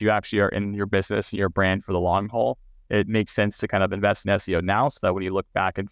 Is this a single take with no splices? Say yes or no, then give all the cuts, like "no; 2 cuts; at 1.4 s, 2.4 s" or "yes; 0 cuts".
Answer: yes; 0 cuts